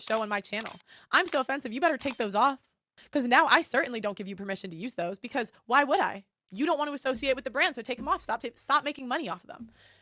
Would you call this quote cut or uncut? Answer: uncut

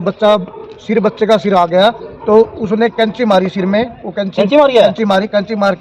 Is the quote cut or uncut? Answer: uncut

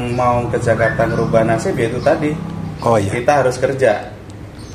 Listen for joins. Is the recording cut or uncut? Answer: uncut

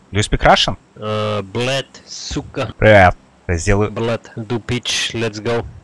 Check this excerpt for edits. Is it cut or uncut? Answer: cut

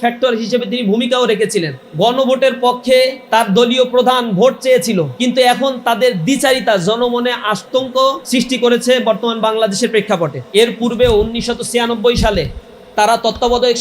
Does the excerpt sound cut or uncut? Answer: cut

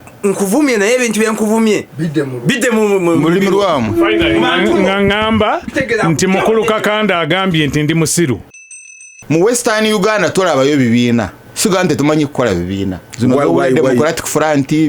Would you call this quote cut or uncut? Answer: cut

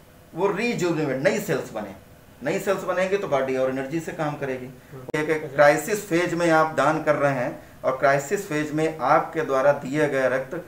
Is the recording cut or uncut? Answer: cut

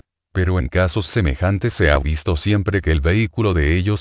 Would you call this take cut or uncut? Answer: cut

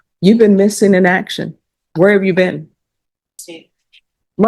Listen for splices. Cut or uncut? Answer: cut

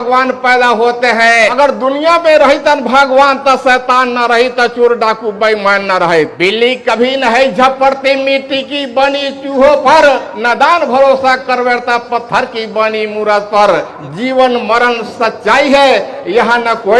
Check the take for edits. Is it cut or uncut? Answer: cut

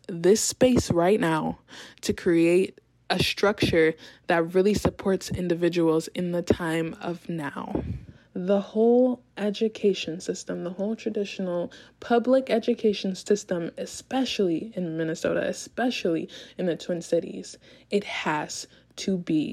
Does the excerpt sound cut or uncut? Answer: cut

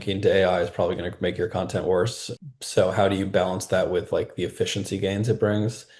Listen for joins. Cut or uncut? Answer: uncut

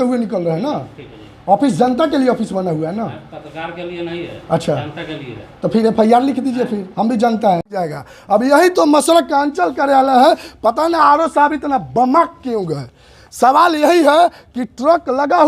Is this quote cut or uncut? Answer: cut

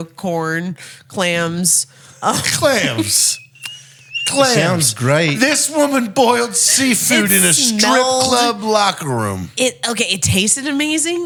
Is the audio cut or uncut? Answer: uncut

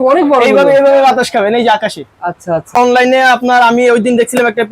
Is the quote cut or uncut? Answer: cut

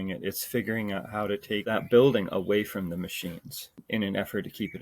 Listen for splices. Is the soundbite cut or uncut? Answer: cut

